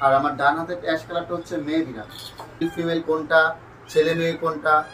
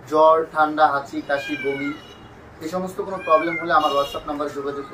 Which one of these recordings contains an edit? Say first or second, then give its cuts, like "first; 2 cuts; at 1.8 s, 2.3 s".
first; 1 cut; at 2.6 s